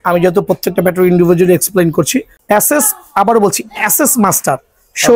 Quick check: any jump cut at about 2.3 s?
yes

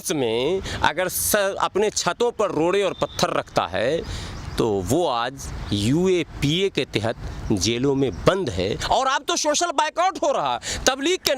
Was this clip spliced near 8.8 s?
yes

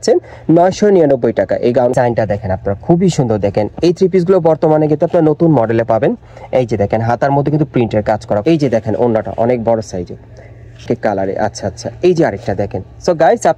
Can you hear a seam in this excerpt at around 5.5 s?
no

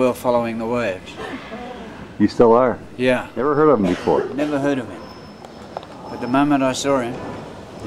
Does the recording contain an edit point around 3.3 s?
yes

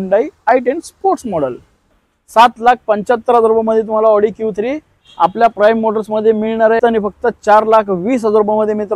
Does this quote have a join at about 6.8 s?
yes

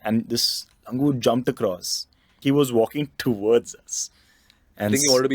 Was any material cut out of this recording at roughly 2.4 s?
yes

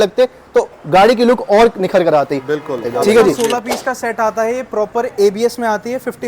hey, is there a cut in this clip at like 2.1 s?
no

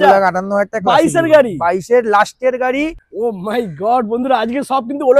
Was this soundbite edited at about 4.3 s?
no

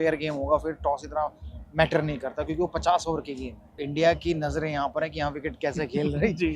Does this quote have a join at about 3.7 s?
yes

